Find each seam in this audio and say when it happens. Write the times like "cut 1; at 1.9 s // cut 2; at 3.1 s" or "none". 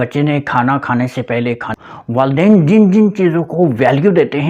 cut 1; at 1.7 s